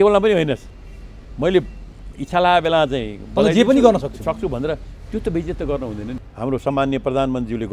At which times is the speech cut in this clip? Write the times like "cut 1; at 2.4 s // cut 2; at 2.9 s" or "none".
cut 1; at 6.1 s